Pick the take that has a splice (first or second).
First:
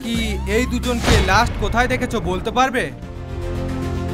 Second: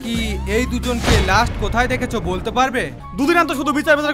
second